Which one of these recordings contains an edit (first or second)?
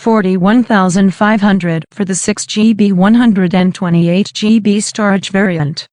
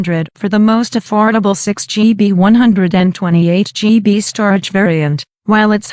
first